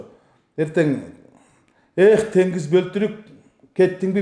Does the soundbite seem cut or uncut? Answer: uncut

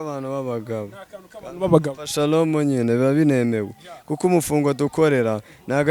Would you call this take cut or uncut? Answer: uncut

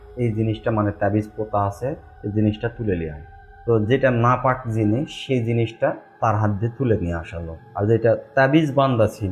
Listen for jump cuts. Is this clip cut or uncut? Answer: uncut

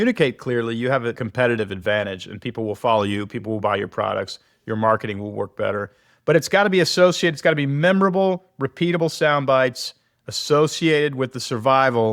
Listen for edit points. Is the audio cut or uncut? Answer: cut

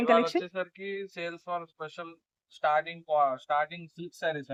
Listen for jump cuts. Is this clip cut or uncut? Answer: uncut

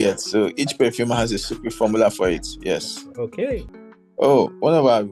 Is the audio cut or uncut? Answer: cut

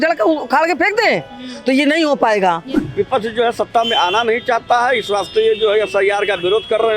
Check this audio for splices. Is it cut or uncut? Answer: cut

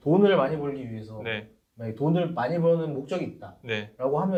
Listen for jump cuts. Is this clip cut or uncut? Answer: uncut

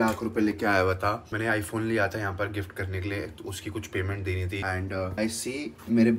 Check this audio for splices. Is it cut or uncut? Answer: cut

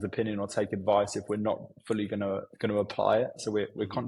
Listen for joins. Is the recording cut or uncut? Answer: uncut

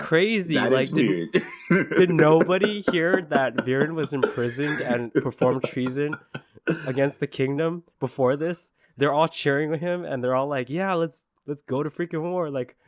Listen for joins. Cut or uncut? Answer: uncut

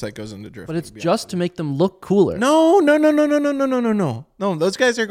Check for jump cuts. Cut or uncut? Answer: uncut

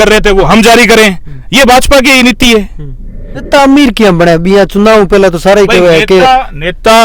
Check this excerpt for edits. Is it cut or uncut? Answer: cut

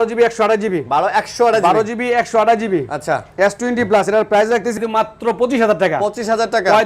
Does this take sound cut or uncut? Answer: cut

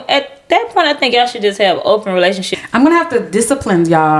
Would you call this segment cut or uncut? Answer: cut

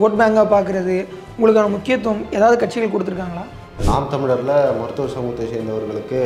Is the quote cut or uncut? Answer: cut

